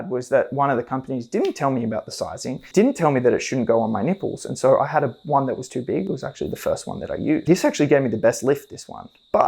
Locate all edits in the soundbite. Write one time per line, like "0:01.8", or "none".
0:02.7
0:07.4